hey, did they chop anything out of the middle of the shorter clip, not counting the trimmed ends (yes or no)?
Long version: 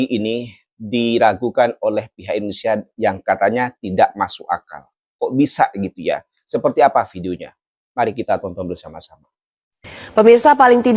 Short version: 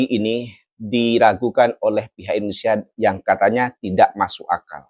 no